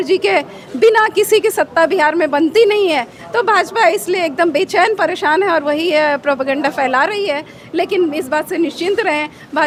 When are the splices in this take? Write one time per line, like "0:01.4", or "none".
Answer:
none